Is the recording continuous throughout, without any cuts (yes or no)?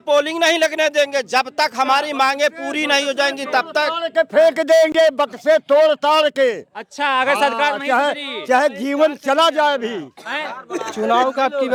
yes